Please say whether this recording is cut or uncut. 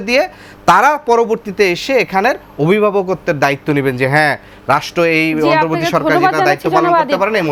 uncut